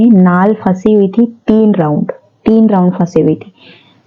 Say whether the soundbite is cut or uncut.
uncut